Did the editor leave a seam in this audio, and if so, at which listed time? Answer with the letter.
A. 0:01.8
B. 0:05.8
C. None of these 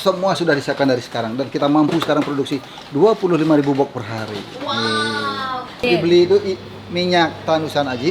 B